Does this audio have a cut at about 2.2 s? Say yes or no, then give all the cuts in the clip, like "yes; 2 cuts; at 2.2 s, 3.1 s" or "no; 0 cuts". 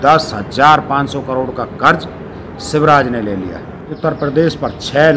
no; 1 cut; at 4.0 s